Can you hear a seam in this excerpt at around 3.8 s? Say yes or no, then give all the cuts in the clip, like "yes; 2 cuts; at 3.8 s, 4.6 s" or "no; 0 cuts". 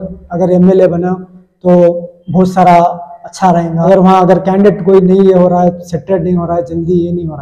yes; 1 cut; at 3.8 s